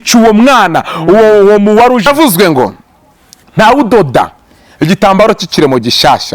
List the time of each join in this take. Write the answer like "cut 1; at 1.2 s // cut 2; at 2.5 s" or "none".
cut 1; at 2.1 s

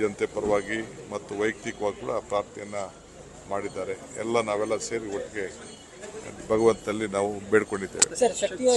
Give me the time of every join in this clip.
cut 1; at 7.7 s

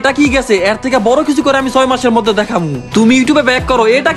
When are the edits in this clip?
cut 1; at 2.8 s

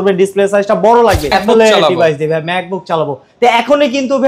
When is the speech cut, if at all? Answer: cut 1; at 1.3 s

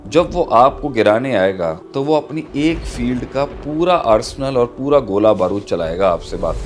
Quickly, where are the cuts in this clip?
none

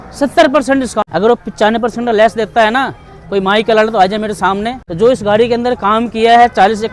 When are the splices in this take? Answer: cut 1; at 1.1 s // cut 2; at 4.8 s

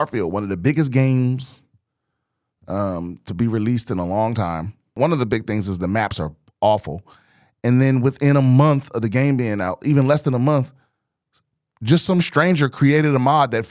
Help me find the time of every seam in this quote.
cut 1; at 5.0 s

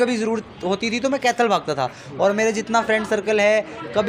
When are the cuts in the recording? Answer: none

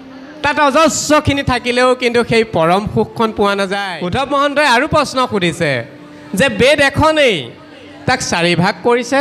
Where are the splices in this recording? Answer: cut 1; at 4.0 s

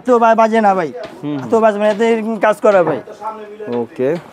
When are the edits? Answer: none

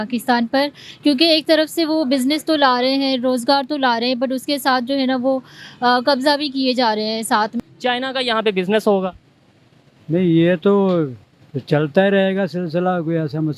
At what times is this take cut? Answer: cut 1; at 7.6 s

